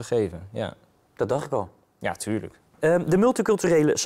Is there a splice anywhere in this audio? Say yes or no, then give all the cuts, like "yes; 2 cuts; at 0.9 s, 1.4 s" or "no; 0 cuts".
no; 0 cuts